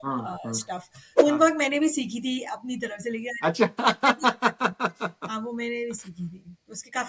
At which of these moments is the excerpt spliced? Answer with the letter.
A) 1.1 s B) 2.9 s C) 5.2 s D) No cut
A